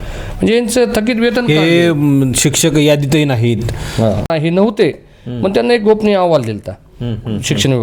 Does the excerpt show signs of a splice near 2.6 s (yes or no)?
no